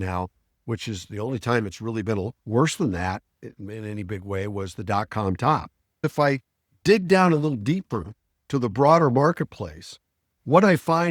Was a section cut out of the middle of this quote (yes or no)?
yes